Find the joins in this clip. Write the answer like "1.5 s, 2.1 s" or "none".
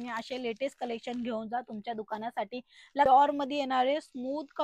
3.1 s